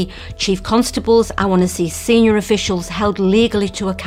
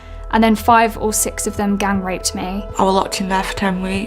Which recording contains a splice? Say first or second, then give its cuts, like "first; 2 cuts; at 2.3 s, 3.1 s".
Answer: second; 1 cut; at 2.7 s